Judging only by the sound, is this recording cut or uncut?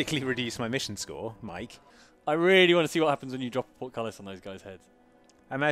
cut